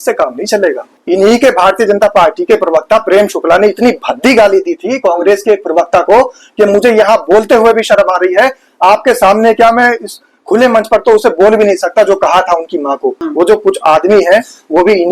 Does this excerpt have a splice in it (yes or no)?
yes